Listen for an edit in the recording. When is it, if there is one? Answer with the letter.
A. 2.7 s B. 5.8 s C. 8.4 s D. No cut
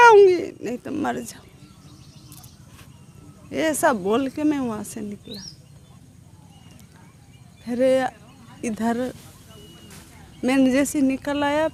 D